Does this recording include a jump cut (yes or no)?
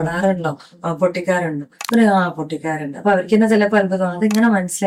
no